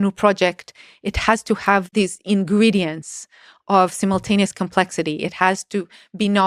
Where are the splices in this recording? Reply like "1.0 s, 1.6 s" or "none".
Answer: 1.9 s